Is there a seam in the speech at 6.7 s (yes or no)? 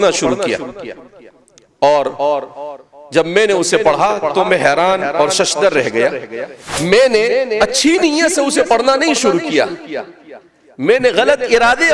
yes